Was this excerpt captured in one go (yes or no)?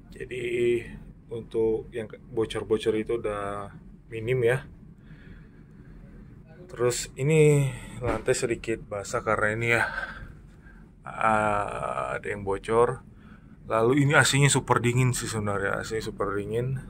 yes